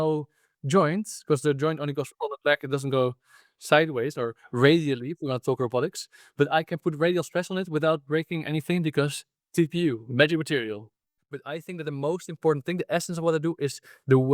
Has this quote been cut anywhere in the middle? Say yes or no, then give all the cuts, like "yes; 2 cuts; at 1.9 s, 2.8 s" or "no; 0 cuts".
yes; 1 cut; at 11.4 s